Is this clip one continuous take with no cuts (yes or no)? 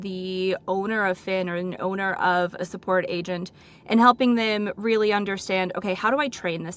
yes